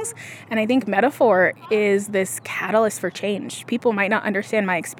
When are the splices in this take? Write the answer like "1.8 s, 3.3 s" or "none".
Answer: none